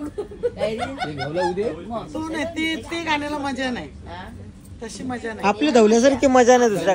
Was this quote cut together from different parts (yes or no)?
no